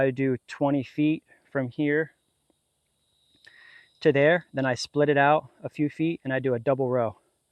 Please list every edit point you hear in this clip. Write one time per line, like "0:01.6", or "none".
none